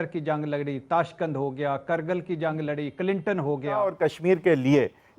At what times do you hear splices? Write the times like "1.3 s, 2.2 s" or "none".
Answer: 3.9 s